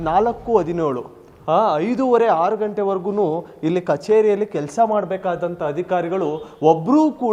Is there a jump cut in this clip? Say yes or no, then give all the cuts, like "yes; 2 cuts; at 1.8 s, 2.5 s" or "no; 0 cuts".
no; 0 cuts